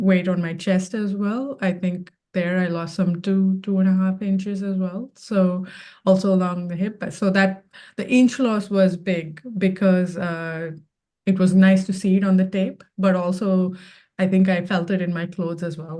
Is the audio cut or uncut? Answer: uncut